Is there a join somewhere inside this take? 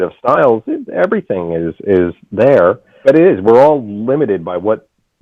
yes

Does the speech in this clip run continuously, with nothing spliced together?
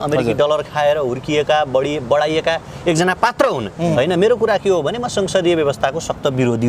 no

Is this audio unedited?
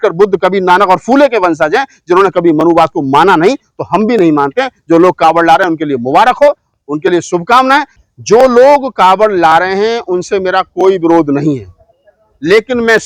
no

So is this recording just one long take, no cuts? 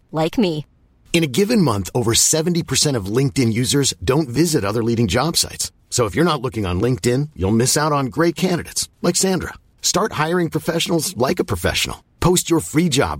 yes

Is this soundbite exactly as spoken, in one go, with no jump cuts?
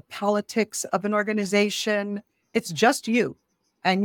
no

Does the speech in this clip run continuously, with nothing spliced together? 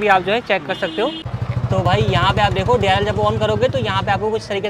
no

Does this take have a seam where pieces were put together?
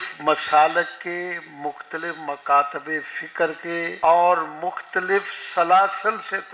yes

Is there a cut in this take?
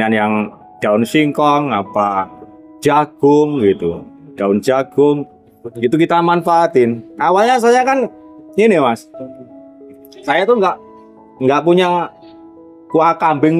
yes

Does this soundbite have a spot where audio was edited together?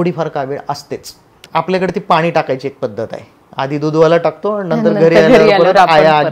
yes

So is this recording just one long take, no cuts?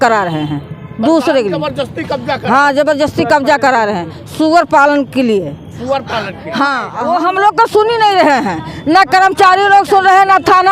no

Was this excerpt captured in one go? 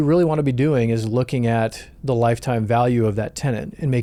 yes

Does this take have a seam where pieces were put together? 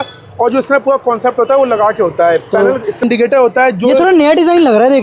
yes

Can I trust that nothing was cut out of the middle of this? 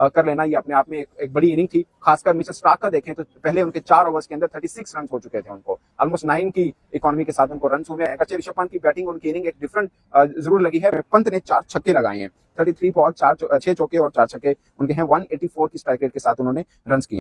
yes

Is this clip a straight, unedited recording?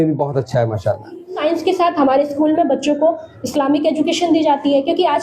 no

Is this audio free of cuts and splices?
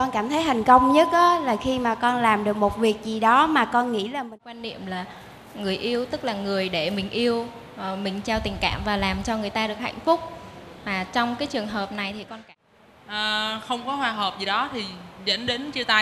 no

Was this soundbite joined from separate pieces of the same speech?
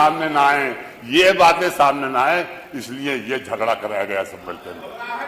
no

